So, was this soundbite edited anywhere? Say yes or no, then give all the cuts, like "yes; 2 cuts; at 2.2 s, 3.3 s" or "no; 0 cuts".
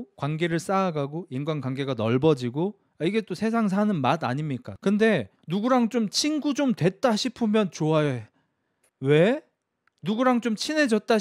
yes; 1 cut; at 4.6 s